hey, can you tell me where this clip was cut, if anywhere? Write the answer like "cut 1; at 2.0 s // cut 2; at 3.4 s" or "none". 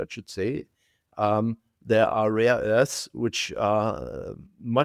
none